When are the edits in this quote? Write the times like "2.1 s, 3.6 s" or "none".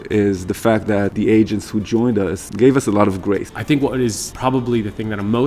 1.1 s, 2.5 s, 3.5 s, 4.3 s